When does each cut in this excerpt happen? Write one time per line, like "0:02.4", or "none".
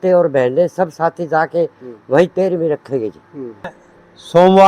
0:03.8